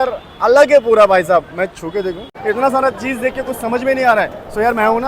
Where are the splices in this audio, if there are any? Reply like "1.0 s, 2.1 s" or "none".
2.3 s

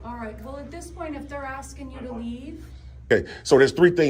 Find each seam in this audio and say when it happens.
3.1 s

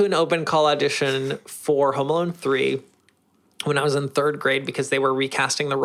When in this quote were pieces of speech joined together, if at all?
none

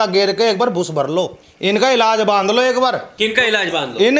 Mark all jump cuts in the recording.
1.4 s, 3.1 s

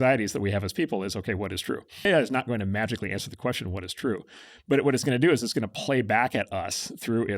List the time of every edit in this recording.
2.1 s

